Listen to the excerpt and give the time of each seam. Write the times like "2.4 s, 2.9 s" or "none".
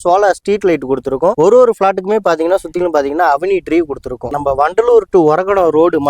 4.3 s